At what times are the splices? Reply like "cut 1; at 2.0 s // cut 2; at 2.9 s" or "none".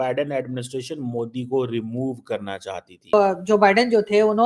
cut 1; at 3.1 s